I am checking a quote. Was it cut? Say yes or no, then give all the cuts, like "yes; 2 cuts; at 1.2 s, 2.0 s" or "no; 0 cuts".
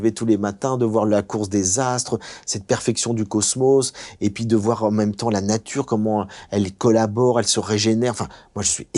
no; 0 cuts